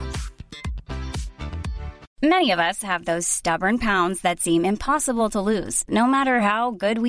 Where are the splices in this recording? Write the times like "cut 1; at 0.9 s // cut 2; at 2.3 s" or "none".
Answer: cut 1; at 2.0 s